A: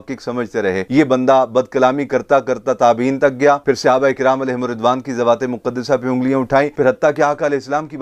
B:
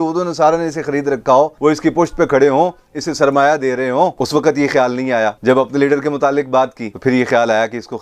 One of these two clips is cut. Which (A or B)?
A